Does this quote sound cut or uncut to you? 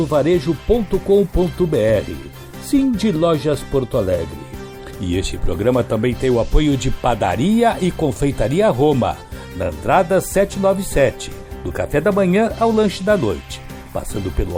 uncut